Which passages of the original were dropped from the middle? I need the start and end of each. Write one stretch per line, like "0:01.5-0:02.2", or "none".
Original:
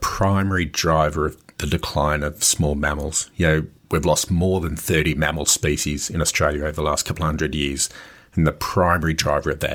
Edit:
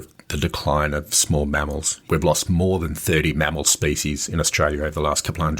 0:03.2-0:03.8